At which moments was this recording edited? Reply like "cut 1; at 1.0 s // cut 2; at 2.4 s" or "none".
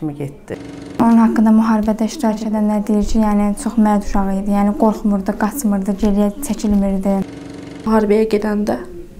cut 1; at 1.0 s // cut 2; at 7.5 s